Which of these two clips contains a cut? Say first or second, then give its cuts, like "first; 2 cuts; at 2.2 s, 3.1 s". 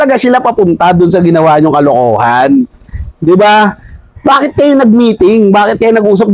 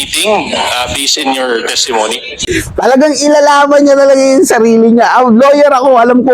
second; 1 cut; at 2.4 s